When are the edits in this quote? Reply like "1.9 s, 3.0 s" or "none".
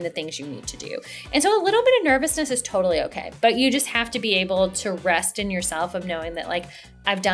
none